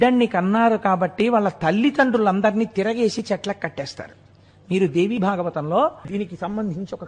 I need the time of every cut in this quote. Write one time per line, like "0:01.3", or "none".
0:06.1